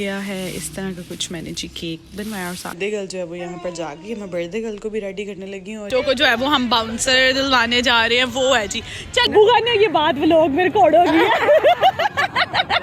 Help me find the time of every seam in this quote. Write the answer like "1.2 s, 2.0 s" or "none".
2.8 s, 5.9 s, 9.3 s

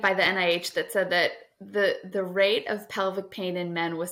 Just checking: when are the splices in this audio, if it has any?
none

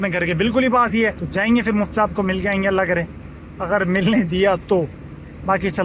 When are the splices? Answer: none

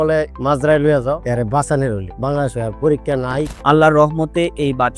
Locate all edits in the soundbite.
1.2 s, 3.5 s

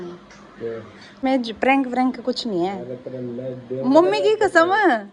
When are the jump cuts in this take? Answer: 1.2 s

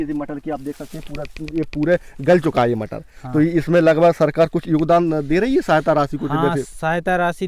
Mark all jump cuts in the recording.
none

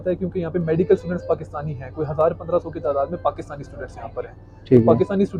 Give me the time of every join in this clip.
none

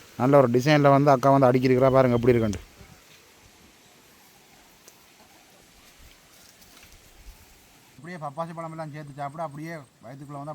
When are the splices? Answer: 8.0 s

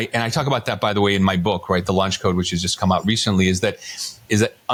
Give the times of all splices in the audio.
none

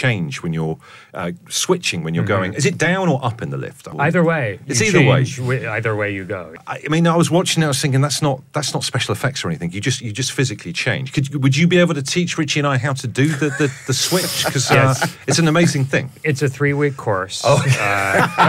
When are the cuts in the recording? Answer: none

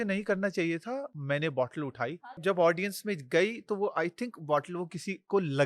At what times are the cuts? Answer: 1.1 s, 2.2 s

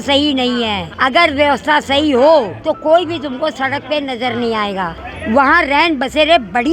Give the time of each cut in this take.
none

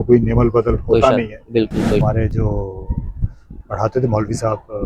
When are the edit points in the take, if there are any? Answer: 2.0 s

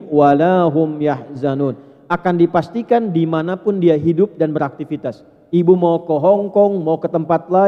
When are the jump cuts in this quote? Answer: none

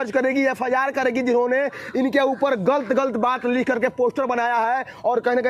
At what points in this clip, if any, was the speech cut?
none

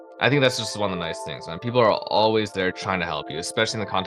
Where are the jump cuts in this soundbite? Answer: none

